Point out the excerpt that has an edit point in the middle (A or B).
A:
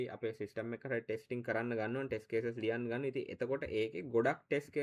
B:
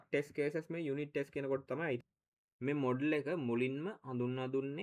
B